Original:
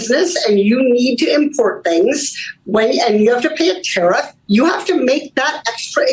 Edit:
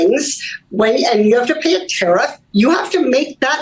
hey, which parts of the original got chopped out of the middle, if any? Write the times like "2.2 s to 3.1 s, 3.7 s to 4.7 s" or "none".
none